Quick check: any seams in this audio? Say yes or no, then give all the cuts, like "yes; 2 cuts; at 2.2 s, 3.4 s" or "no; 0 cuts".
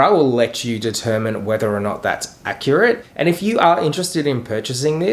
yes; 1 cut; at 3.1 s